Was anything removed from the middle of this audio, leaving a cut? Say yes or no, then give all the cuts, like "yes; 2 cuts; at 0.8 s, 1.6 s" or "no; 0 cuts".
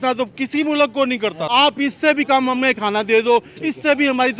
yes; 1 cut; at 1.5 s